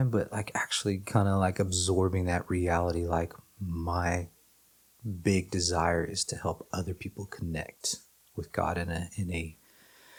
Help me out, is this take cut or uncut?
uncut